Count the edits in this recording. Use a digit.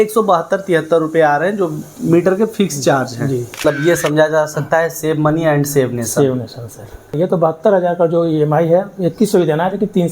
2